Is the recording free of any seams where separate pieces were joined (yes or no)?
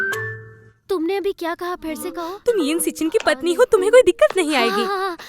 no